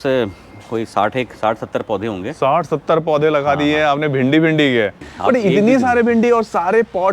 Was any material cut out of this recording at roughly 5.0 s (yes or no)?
yes